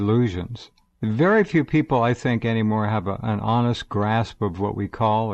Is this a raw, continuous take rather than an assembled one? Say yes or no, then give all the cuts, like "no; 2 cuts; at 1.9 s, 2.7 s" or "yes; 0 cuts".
yes; 0 cuts